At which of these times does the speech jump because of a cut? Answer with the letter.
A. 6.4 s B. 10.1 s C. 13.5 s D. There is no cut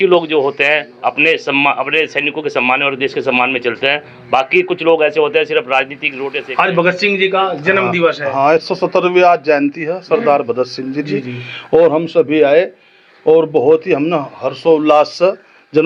A